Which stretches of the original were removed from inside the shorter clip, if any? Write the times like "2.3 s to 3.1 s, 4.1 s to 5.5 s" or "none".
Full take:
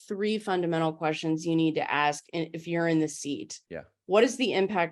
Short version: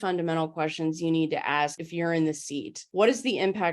2.3 s to 2.6 s, 3.5 s to 3.9 s